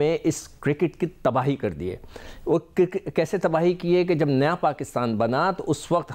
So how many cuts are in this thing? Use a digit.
0